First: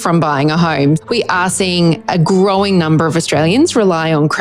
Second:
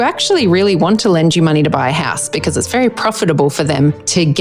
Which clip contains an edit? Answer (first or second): first